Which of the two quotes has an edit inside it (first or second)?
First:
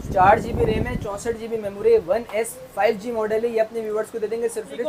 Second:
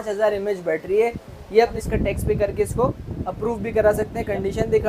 second